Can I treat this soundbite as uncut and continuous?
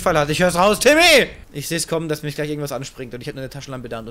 no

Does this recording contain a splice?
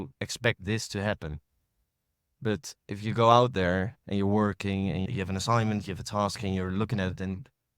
yes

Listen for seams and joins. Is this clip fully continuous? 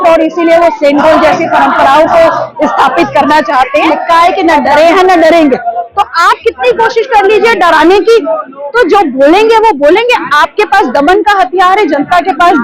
no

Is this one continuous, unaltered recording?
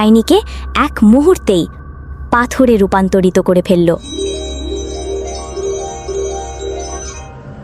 yes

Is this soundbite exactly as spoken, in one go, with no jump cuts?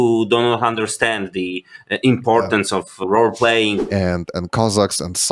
no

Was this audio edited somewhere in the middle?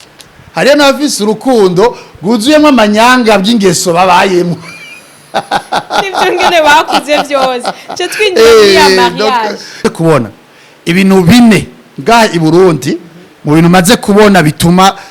yes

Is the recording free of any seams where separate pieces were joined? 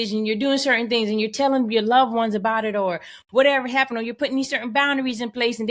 yes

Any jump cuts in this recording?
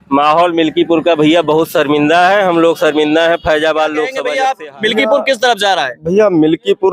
yes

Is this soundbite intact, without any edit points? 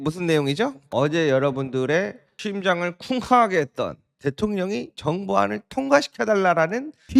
no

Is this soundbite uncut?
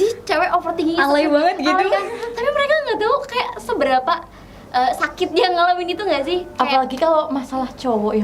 yes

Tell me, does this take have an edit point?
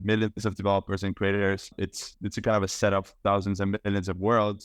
no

